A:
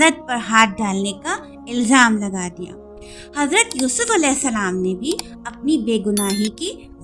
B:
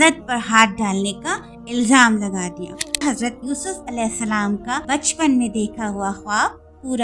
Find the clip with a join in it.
B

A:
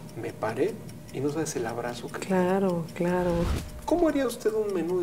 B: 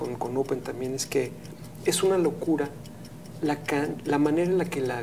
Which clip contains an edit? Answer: A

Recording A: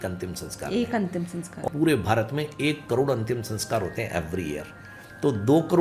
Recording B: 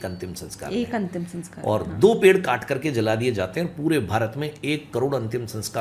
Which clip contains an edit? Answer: A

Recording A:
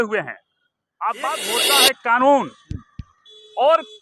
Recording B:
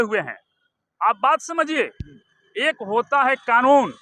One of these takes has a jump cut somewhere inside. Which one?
A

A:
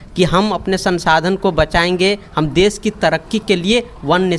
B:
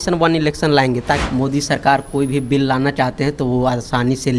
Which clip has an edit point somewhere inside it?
B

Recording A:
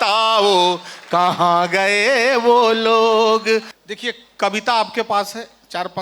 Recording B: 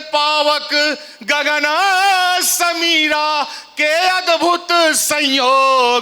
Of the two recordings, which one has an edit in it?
A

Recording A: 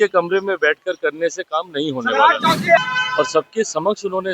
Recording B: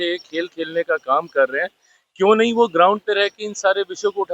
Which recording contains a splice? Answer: A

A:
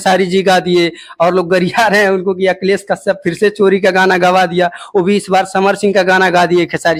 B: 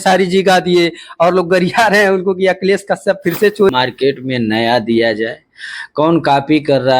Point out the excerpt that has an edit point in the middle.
B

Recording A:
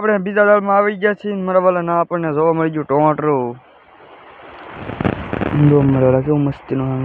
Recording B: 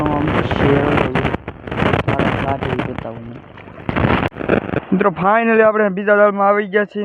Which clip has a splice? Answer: B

